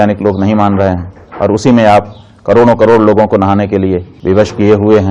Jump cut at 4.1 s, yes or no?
yes